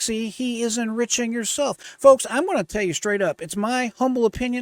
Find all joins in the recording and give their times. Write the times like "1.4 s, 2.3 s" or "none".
none